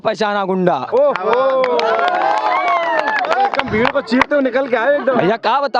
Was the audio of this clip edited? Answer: no; 0 cuts

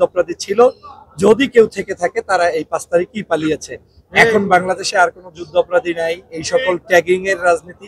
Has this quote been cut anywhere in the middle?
no; 0 cuts

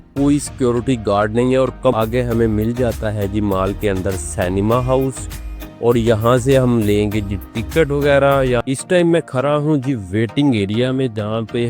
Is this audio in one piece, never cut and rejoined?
no; 2 cuts; at 1.9 s, 8.6 s

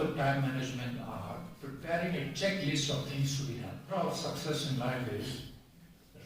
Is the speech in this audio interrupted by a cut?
yes; 1 cut; at 3.7 s

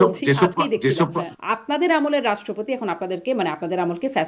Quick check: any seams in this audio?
yes; 1 cut; at 1.3 s

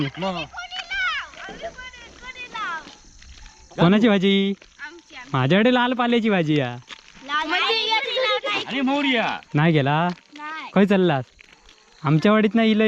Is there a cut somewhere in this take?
no; 0 cuts

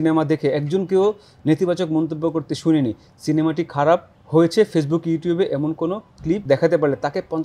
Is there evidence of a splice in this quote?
yes; 2 cuts; at 4.2 s, 6.4 s

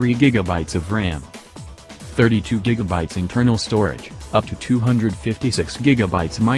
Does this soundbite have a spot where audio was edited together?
no; 0 cuts

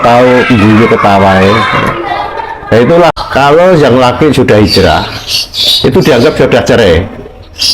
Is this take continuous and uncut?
no; 1 cut; at 3.1 s

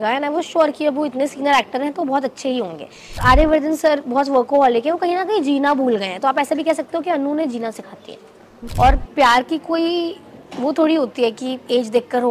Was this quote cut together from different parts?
yes; 2 cuts; at 3.2 s, 8.6 s

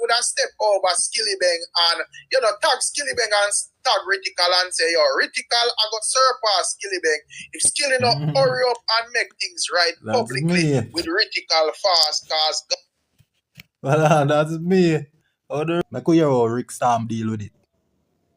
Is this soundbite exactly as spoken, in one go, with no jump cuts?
no; 1 cut; at 15.8 s

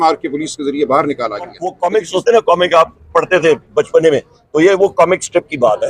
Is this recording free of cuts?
no; 1 cut; at 1.6 s

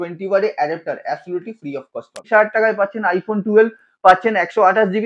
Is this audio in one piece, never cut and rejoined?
no; 1 cut; at 2.2 s

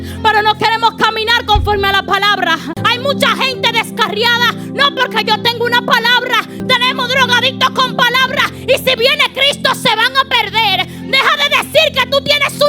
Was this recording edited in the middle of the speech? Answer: yes; 2 cuts; at 2.8 s, 6.6 s

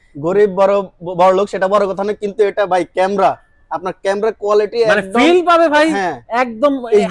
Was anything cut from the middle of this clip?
no; 0 cuts

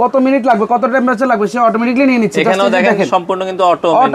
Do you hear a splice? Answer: no; 0 cuts

